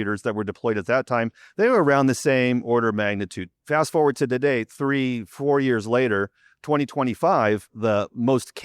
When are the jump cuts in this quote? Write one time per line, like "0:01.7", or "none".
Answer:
0:03.4